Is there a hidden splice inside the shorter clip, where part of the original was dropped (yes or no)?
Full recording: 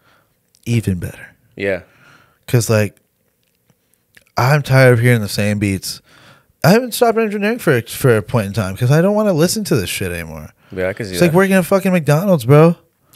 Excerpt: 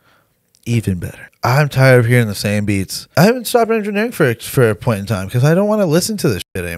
yes